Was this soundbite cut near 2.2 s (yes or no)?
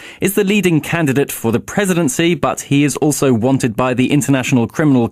yes